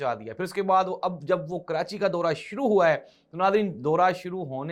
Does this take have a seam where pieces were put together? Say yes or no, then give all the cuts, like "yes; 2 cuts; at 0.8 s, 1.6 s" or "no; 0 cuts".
no; 0 cuts